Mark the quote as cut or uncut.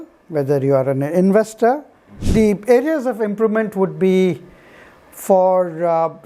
cut